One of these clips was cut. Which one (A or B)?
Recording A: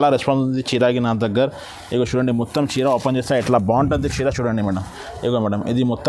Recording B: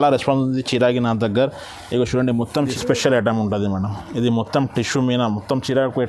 B